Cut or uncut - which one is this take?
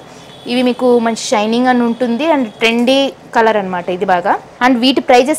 cut